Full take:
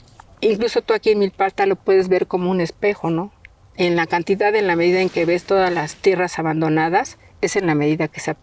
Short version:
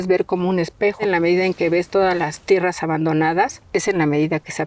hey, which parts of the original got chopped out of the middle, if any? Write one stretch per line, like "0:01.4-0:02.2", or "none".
0:03.0-0:04.6
0:07.1-0:07.3